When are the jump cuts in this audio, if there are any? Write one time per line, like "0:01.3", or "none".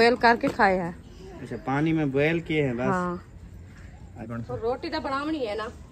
0:04.3